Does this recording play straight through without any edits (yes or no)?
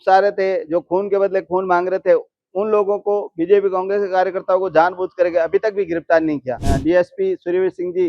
no